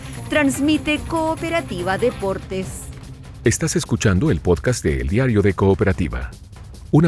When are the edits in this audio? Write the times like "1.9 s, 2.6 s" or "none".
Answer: 3.1 s